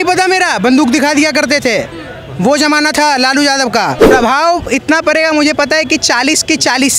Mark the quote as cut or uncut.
cut